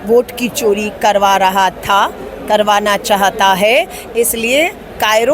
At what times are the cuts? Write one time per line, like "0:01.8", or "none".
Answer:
none